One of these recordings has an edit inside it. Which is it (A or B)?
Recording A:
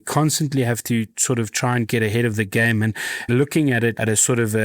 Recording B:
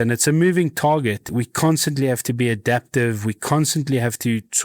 A